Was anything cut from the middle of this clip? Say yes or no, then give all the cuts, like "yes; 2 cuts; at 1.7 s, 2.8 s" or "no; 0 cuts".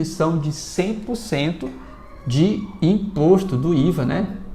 no; 0 cuts